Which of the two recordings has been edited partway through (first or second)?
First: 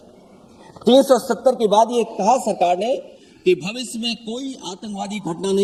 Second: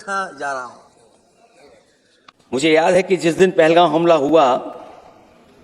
second